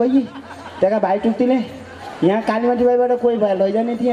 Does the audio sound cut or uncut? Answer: uncut